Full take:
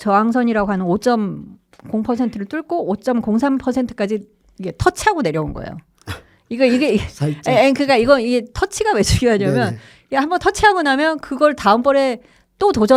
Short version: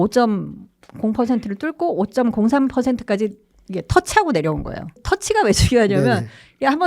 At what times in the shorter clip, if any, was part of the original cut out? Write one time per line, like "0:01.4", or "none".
0:05.1